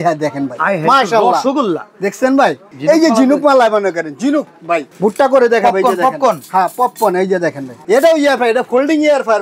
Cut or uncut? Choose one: cut